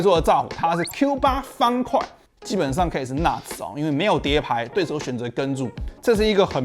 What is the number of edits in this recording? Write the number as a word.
two